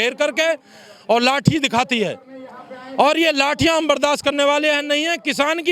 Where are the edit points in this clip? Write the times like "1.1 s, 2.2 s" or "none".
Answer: none